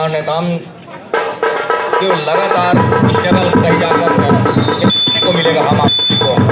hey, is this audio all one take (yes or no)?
yes